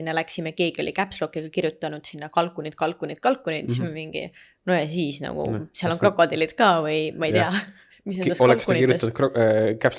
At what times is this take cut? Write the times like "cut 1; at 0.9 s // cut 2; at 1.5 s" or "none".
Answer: none